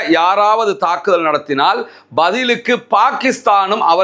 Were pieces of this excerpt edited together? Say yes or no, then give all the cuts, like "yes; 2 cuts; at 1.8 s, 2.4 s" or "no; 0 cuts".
no; 0 cuts